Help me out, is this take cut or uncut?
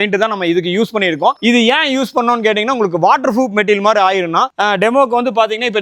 uncut